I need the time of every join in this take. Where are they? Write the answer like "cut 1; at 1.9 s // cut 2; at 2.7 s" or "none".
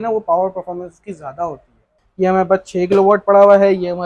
cut 1; at 2.0 s

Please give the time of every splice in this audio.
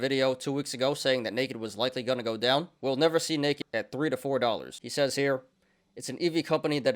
cut 1; at 4.8 s

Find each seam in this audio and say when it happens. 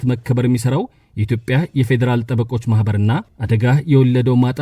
cut 1; at 3.3 s

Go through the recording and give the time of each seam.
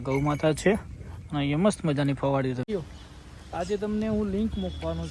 cut 1; at 2.7 s

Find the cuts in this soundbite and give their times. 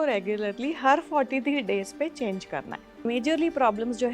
cut 1; at 3.0 s

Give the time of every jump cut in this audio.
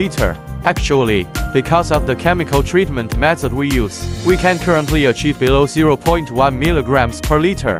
none

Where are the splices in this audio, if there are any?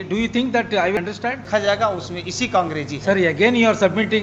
cut 1; at 1.0 s

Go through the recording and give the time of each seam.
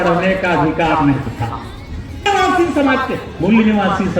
cut 1; at 2.2 s

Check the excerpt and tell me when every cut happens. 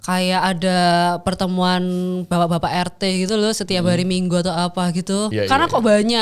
cut 1; at 5.3 s

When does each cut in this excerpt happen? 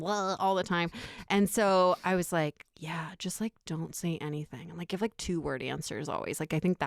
none

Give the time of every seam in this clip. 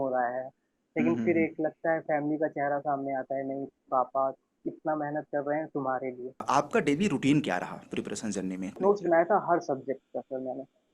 cut 1; at 6.4 s // cut 2; at 8.8 s

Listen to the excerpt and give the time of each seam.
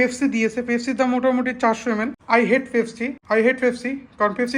cut 1; at 2.2 s // cut 2; at 3.2 s

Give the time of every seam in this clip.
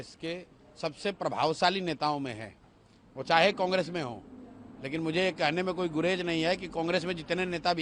none

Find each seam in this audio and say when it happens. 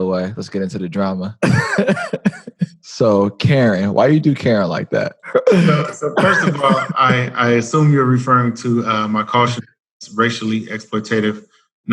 cut 1; at 1.3 s // cut 2; at 2.8 s // cut 3; at 5.2 s

